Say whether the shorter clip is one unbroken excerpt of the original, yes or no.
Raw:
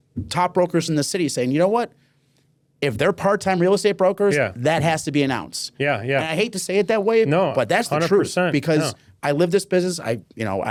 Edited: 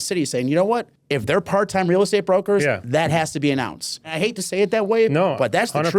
no